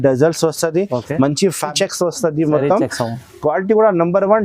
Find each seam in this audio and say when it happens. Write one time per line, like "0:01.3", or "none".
0:01.7